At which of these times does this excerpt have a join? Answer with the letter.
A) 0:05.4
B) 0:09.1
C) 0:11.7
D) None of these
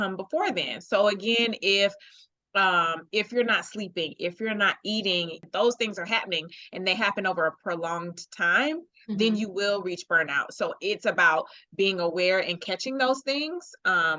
A